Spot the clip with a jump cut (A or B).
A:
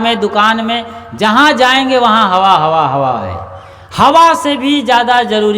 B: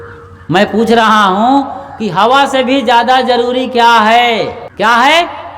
B